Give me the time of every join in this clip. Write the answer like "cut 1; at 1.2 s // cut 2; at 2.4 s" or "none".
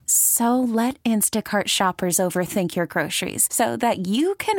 none